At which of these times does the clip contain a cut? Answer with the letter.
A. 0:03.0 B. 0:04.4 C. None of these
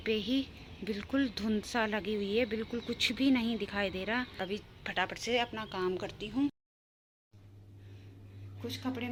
C